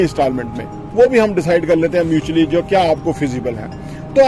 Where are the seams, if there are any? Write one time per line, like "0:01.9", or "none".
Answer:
none